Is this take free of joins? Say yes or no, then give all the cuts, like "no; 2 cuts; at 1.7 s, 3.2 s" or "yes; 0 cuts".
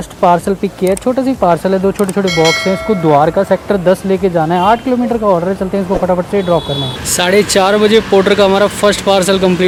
yes; 0 cuts